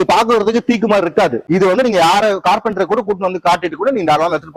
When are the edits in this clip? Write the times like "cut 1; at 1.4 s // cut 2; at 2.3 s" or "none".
cut 1; at 1.4 s